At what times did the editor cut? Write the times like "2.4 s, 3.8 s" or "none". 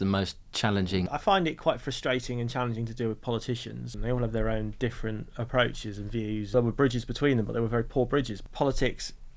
1.1 s, 3.9 s, 6.5 s, 8.4 s